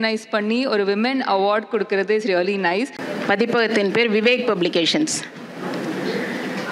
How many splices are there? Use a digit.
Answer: 1